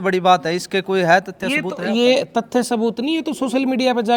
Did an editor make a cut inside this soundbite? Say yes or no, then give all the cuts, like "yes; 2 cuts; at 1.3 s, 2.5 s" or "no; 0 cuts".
no; 0 cuts